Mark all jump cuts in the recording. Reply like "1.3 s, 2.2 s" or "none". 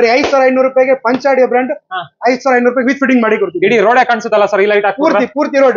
none